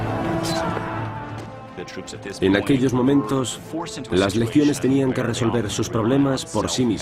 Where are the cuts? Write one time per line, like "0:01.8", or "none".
none